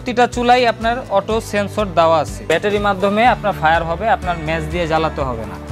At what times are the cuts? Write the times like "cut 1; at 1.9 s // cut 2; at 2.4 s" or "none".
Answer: cut 1; at 2.5 s

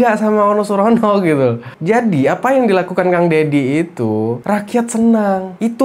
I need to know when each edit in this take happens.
cut 1; at 1.7 s

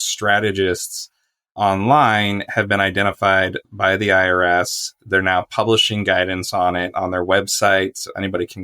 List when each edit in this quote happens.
cut 1; at 1.6 s

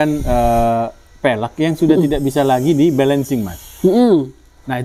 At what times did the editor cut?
none

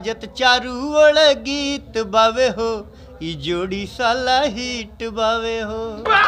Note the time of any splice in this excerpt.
none

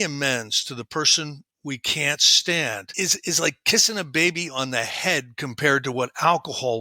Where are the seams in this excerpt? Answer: cut 1; at 2.9 s

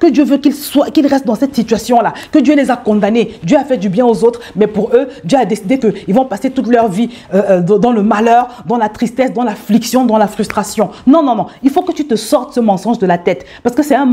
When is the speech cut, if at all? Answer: none

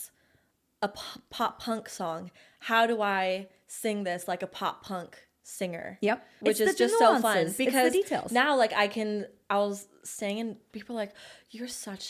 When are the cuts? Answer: cut 1; at 6.3 s

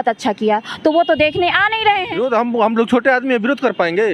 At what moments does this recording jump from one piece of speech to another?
cut 1; at 2.1 s

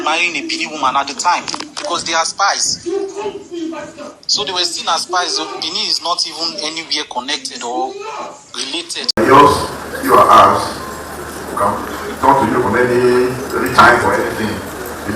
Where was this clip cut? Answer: cut 1; at 9.2 s

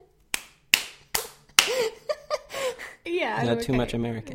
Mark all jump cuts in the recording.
cut 1; at 2.9 s

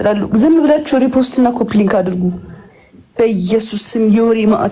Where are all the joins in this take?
none

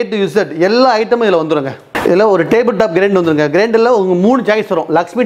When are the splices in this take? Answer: none

